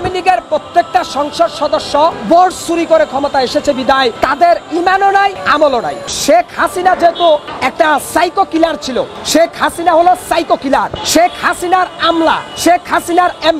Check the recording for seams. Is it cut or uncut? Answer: cut